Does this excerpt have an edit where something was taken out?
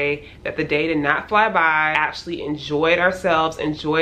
yes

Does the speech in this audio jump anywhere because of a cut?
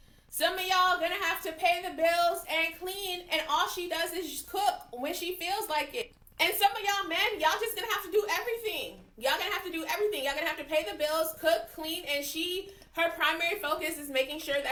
no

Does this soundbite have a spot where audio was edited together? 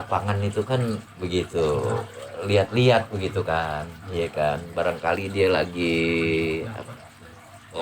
yes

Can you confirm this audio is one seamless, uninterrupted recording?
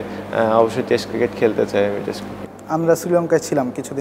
yes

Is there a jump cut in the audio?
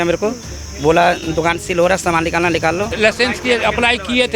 yes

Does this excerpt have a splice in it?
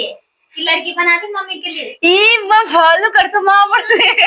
no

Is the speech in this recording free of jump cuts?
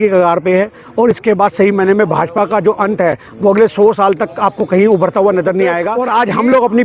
no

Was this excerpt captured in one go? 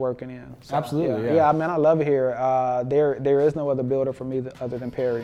yes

